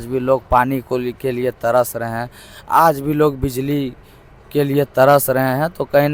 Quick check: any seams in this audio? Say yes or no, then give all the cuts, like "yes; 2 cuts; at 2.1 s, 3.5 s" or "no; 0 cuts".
no; 0 cuts